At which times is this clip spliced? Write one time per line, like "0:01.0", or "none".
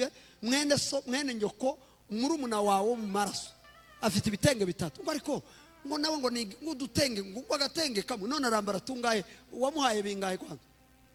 none